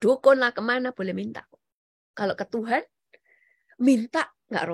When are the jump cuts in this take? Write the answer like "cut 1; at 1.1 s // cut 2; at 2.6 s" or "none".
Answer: none